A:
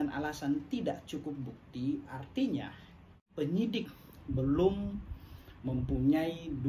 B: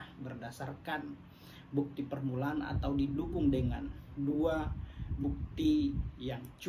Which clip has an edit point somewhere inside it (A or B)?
A